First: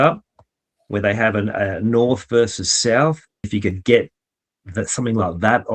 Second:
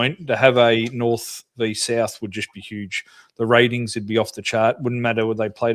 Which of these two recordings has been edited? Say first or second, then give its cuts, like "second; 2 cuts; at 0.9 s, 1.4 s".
first; 1 cut; at 3.5 s